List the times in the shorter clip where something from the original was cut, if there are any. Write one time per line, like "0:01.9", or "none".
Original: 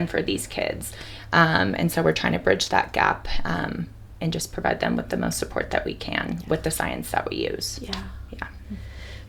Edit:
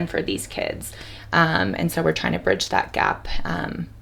none